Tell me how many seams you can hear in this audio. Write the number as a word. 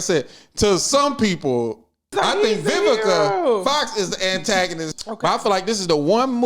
two